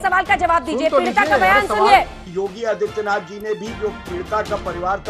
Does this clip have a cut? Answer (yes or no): yes